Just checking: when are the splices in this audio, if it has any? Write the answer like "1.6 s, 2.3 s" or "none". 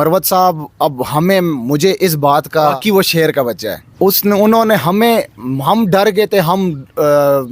2.8 s, 3.8 s